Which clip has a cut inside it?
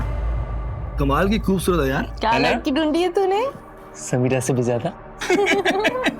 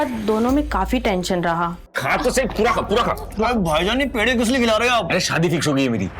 second; 1 cut; at 1.8 s

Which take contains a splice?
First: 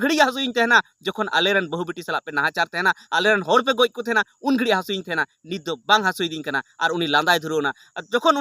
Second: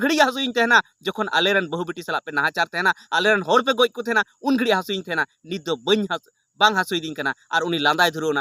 first; 1 cut; at 5.7 s

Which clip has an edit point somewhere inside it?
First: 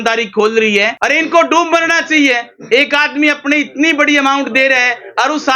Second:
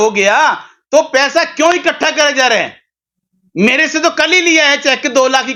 first; 1 cut; at 0.9 s

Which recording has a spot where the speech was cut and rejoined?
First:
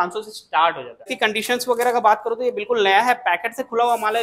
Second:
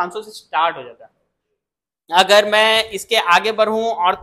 first; 1 cut; at 1.1 s

